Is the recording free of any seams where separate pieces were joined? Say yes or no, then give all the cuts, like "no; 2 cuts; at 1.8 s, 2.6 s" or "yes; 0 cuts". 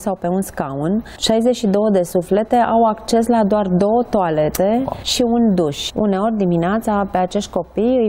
no; 3 cuts; at 1.1 s, 5.0 s, 5.8 s